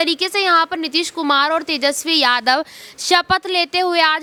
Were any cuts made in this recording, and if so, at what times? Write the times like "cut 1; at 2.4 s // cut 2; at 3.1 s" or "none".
none